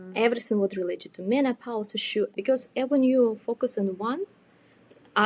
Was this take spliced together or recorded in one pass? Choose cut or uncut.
uncut